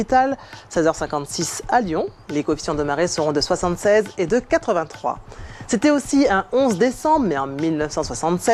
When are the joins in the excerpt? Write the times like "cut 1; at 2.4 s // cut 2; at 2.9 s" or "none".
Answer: none